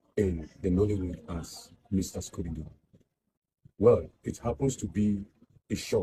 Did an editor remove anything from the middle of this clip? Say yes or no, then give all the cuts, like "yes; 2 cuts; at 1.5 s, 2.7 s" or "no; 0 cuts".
no; 0 cuts